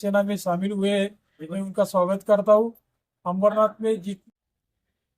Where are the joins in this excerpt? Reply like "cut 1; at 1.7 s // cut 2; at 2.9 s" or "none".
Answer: cut 1; at 4.1 s